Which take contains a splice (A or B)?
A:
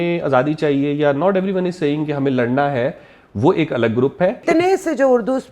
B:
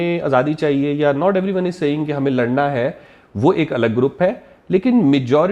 A